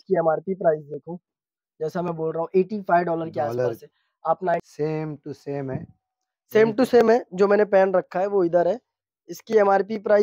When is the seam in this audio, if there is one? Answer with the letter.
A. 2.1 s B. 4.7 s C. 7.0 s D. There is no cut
B